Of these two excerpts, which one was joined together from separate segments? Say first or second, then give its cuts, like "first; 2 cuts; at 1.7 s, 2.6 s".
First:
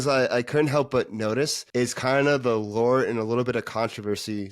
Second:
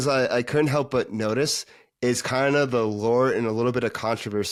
first; 1 cut; at 1.6 s